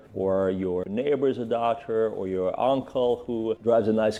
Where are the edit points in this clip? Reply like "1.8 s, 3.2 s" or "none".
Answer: none

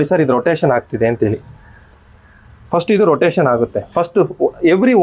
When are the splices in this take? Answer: none

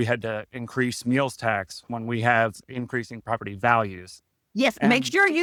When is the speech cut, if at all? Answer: none

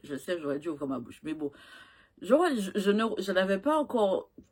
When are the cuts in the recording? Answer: none

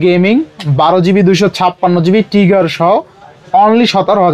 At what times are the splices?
none

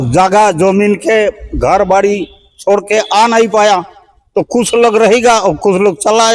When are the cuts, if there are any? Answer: none

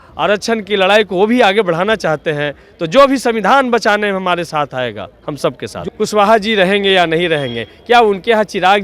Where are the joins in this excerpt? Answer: 5.7 s

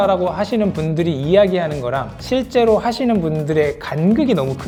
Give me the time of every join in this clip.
none

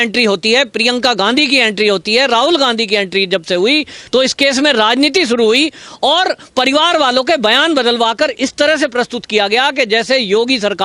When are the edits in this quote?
none

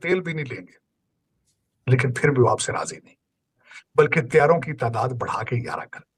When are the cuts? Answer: 3.7 s

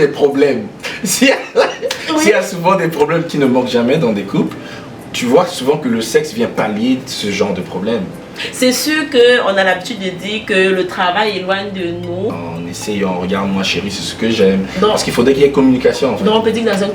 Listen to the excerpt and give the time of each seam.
12.4 s

